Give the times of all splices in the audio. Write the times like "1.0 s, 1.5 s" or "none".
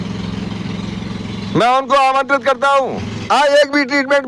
3.1 s